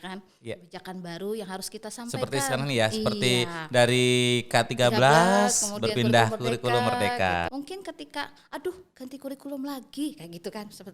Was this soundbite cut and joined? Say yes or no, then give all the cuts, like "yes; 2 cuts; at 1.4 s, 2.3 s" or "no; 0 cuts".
yes; 1 cut; at 7.5 s